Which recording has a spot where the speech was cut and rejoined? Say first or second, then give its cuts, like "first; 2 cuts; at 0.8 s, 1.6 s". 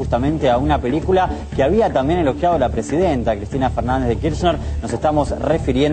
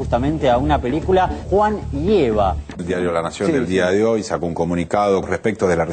second; 2 cuts; at 1.4 s, 2.6 s